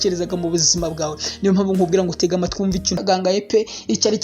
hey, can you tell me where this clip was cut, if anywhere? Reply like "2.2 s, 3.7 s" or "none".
3.0 s